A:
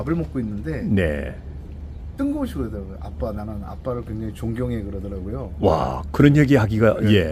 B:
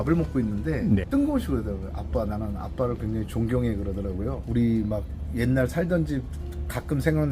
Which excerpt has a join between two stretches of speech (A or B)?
B